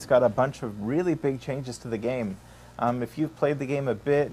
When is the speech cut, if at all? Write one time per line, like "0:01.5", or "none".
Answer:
none